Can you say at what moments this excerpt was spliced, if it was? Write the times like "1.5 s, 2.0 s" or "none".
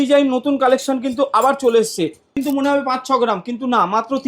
2.4 s